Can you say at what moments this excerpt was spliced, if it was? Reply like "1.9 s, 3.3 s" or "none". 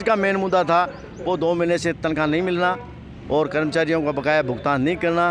none